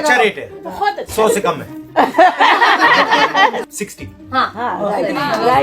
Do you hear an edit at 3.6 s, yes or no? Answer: yes